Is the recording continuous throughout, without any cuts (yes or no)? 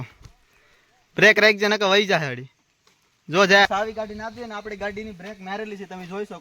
no